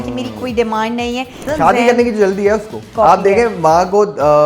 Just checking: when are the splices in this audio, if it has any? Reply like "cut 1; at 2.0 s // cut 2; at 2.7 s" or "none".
cut 1; at 1.5 s // cut 2; at 2.8 s